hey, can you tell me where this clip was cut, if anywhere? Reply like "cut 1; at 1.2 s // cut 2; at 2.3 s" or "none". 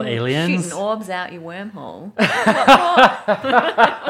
none